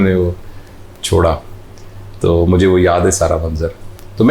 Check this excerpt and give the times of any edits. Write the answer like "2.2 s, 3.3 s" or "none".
none